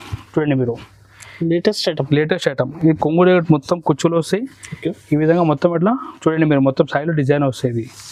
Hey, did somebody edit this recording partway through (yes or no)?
no